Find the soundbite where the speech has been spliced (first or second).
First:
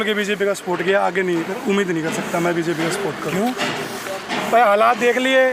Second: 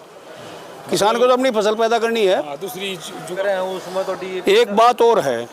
second